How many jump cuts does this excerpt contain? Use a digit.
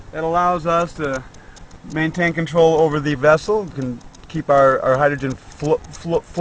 1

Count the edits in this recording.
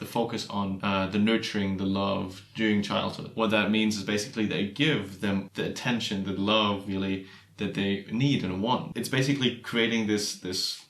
4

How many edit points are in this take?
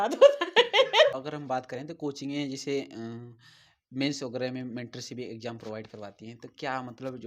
1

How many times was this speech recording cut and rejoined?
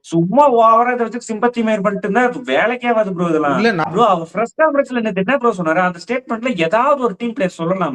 1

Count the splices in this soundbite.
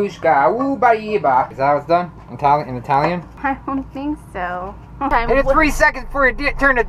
3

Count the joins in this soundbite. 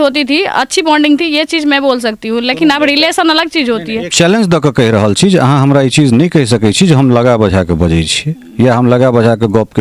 1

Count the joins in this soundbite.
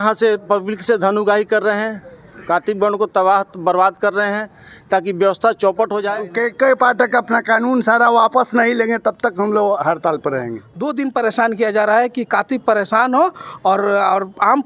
2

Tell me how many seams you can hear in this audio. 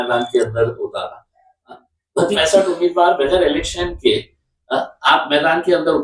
1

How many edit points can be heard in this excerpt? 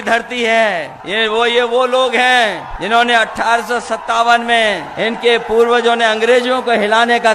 3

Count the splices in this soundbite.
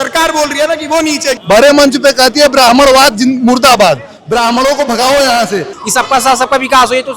2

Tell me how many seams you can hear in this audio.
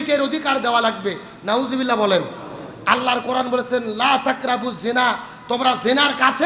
0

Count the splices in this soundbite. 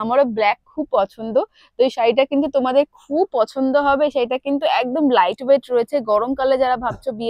0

